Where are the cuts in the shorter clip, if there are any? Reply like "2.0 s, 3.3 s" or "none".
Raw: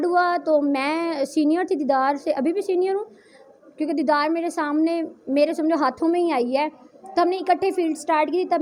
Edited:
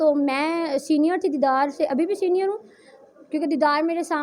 none